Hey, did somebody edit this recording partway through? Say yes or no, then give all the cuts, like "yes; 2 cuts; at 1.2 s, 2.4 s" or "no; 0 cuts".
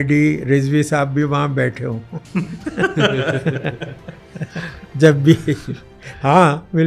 no; 0 cuts